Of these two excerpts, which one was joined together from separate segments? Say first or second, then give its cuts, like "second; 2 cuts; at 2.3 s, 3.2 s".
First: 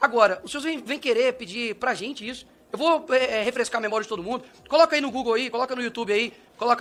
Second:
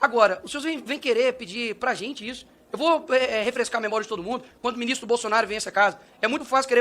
second; 1 cut; at 4.5 s